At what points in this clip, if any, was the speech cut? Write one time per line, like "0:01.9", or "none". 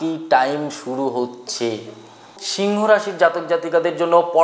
0:02.4

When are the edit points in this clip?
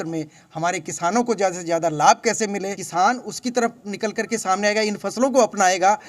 0:02.8

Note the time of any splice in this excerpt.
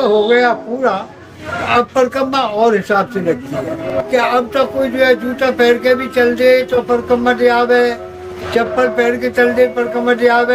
0:03.8

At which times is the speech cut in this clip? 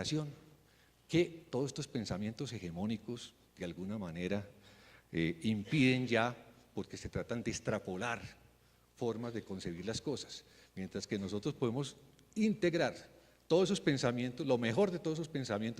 0:07.8

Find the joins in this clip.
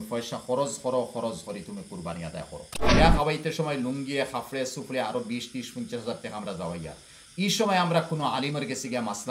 0:02.7

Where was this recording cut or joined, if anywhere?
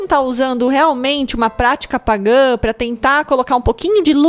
none

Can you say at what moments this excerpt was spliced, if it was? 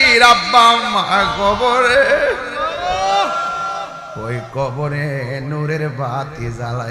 none

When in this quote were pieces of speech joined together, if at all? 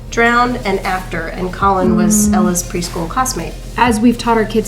0:03.6

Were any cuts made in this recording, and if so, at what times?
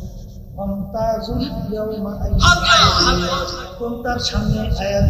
0:03.7

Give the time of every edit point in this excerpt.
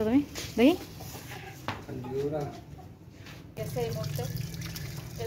0:03.6

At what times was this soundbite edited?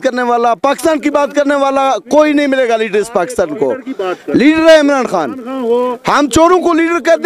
none

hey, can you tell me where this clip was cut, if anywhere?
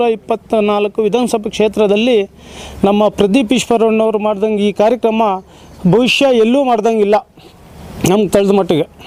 none

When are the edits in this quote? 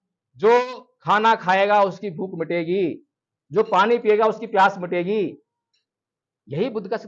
none

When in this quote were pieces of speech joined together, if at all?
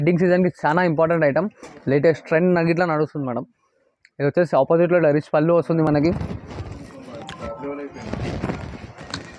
none

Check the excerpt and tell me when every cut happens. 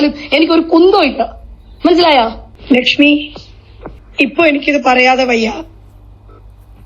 0:02.5

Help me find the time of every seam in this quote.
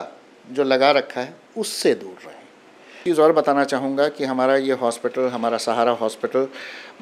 0:03.0

